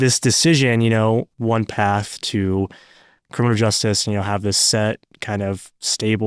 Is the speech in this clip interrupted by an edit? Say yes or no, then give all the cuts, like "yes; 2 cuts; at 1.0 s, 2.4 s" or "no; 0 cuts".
yes; 1 cut; at 1.3 s